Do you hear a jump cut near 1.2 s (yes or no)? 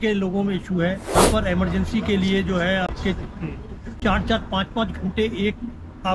yes